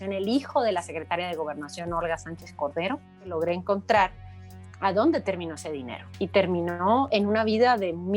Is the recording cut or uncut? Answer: cut